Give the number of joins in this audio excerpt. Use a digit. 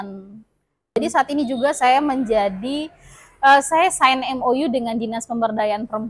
1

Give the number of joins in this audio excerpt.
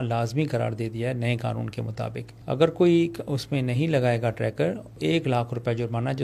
2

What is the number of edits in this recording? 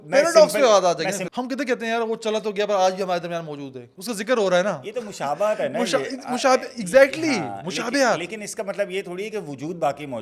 1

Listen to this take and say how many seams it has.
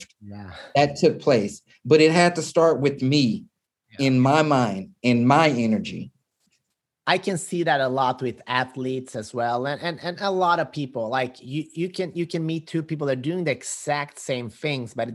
0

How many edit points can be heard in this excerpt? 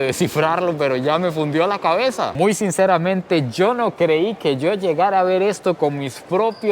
1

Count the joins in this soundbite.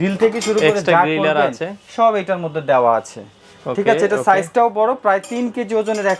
0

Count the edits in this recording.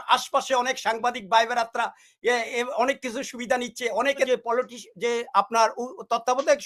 1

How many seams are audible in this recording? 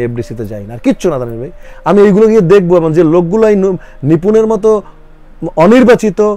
0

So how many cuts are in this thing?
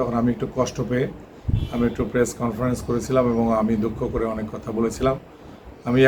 0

